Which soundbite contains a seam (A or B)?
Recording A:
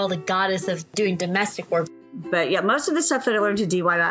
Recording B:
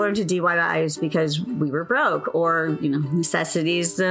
A